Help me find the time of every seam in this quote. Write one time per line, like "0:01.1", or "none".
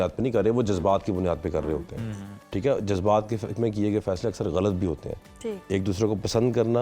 none